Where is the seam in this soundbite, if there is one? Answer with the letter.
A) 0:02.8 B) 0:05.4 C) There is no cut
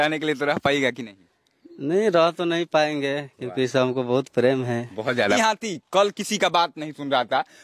B